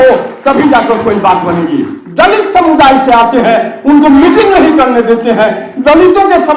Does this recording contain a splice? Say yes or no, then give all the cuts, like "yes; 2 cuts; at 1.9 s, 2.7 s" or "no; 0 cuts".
yes; 1 cut; at 2.0 s